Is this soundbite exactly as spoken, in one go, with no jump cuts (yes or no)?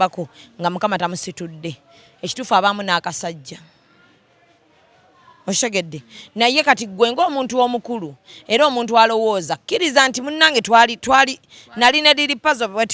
yes